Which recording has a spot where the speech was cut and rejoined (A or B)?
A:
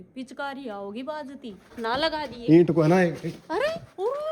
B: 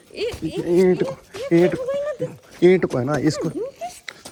A